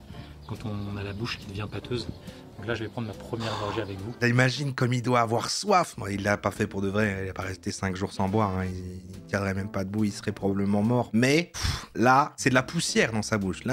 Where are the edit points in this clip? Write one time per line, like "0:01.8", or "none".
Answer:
0:04.2

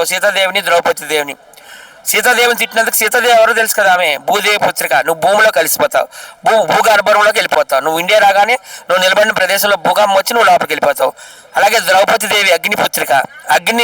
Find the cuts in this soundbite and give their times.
none

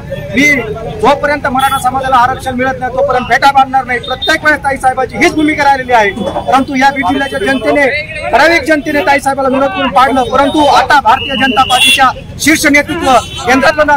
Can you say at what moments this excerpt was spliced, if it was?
none

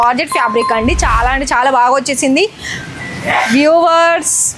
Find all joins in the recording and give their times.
none

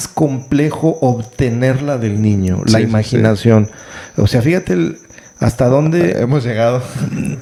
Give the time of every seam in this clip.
none

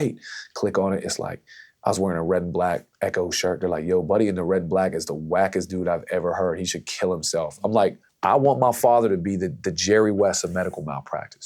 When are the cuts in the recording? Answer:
0:08.1

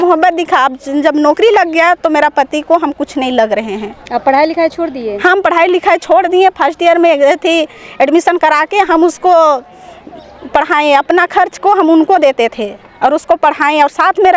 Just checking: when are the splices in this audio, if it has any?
none

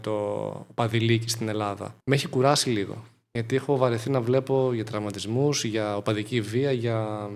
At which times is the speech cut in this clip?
0:01.9

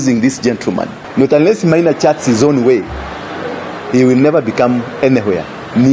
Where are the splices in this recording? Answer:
0:01.0

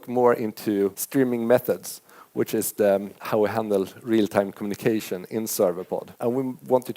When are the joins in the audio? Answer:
0:01.0
0:03.2
0:06.1

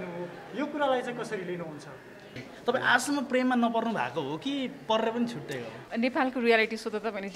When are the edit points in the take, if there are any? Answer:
0:02.5
0:05.8

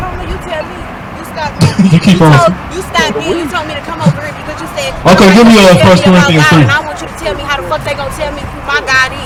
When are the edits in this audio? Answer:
none

